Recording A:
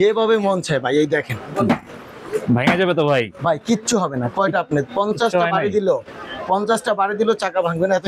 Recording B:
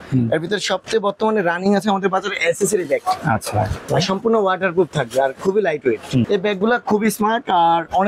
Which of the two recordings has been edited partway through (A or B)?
B